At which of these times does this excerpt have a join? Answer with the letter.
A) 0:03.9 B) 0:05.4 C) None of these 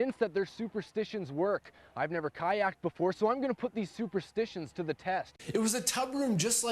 B